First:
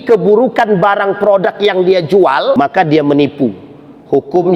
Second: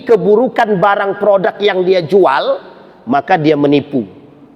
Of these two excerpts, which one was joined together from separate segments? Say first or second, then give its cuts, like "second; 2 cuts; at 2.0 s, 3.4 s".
first; 1 cut; at 2.5 s